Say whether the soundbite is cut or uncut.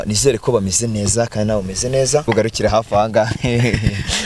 cut